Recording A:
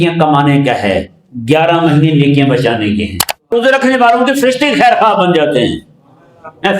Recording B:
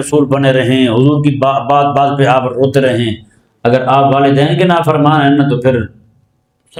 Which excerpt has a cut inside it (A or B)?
A